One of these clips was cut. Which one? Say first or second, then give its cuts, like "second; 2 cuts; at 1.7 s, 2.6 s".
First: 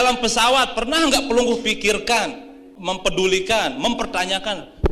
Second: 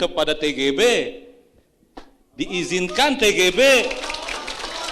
first; 1 cut; at 2.7 s